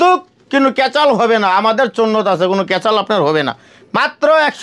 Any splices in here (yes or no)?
no